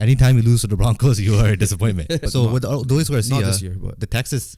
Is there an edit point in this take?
yes; 1 cut; at 2.2 s

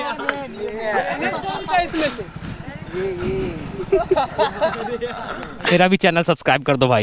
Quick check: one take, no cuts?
no; 1 cut; at 5.7 s

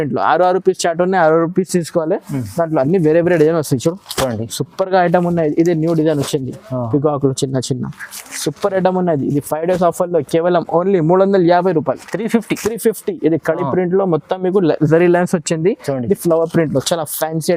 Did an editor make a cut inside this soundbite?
no; 0 cuts

